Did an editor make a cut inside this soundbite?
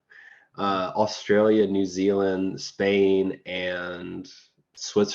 no; 0 cuts

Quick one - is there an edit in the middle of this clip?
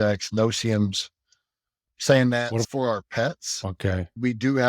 yes; 1 cut; at 2.6 s

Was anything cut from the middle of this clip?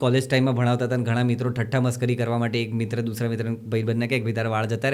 no; 0 cuts

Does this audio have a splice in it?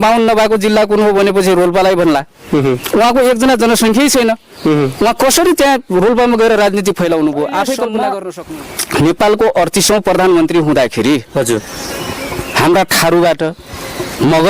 yes; 1 cut; at 8.3 s

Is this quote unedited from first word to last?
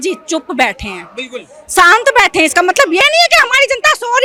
yes; 0 cuts

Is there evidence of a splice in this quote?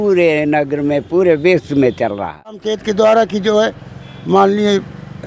yes; 1 cut; at 2.7 s

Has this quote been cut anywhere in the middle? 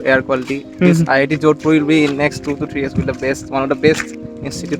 no; 0 cuts

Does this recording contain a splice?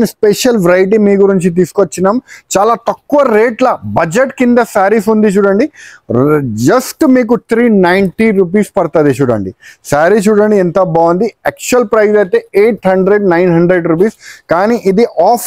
no; 0 cuts

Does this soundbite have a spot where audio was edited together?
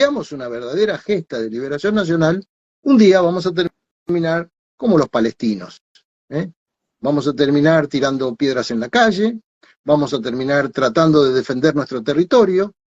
no; 0 cuts

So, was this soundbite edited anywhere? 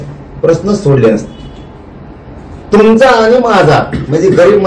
no; 0 cuts

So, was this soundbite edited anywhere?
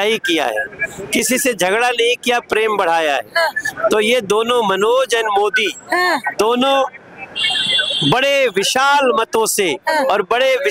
no; 0 cuts

